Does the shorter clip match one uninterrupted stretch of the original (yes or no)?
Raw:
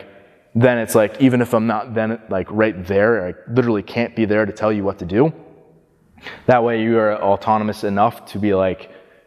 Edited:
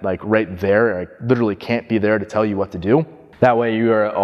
no